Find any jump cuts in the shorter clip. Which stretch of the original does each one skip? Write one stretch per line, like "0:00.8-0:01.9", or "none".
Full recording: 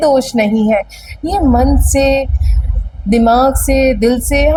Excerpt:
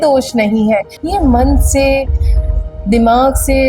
0:01.0-0:01.2